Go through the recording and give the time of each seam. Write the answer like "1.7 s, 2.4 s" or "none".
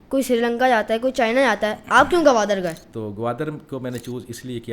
2.9 s